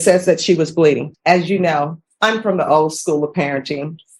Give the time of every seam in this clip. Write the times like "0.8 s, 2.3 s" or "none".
1.1 s, 2.0 s